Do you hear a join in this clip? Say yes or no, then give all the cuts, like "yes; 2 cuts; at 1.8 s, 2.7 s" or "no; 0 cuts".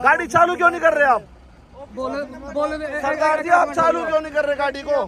no; 0 cuts